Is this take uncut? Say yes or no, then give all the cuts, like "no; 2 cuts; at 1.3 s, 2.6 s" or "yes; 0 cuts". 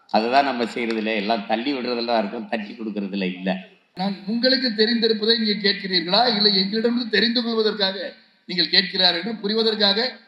no; 1 cut; at 3.8 s